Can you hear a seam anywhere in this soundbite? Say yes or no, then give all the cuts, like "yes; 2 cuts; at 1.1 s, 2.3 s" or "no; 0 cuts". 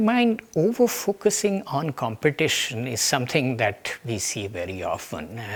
no; 0 cuts